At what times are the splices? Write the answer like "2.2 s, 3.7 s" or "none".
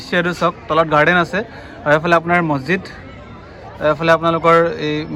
none